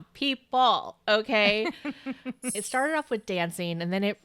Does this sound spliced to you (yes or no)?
yes